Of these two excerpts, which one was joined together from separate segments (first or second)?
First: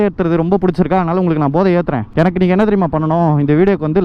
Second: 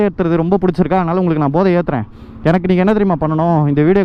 first